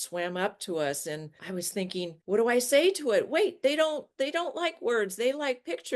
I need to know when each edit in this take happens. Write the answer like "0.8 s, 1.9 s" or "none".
none